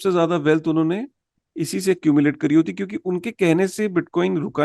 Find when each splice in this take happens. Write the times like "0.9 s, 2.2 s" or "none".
none